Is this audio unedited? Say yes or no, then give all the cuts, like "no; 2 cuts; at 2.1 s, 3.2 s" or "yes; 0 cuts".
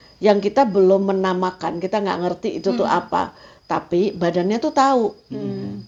yes; 0 cuts